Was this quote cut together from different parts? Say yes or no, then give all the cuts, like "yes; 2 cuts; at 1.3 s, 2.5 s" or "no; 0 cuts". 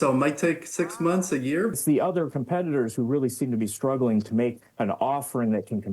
yes; 1 cut; at 1.8 s